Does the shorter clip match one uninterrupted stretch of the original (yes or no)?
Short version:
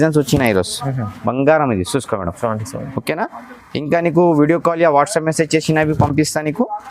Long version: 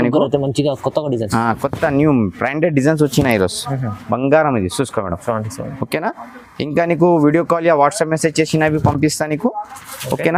yes